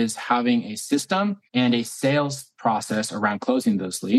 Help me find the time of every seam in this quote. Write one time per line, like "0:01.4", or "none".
0:01.4